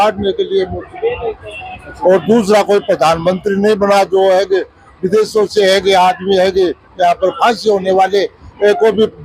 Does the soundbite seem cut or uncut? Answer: uncut